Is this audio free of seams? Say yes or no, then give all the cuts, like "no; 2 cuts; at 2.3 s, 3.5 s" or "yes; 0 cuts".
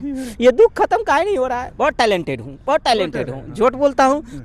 no; 1 cut; at 1.6 s